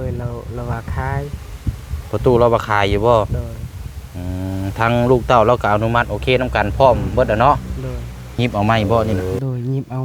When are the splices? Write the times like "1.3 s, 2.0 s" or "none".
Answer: 8.4 s